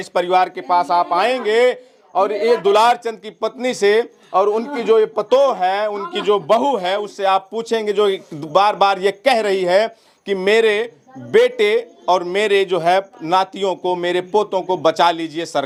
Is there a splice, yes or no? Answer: no